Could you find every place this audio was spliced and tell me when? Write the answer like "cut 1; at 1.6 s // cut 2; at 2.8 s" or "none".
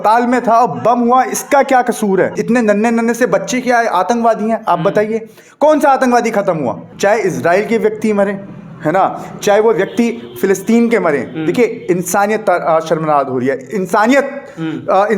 cut 1; at 2.4 s // cut 2; at 6.8 s